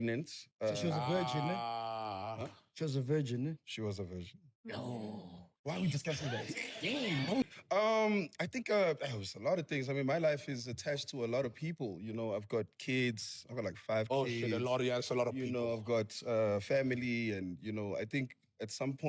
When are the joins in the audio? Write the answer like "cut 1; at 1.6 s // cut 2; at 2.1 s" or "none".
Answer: cut 1; at 7.5 s